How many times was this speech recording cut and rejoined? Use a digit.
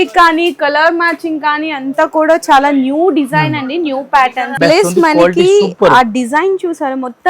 1